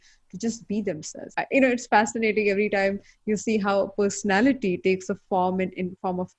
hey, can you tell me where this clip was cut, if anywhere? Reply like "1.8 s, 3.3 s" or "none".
1.2 s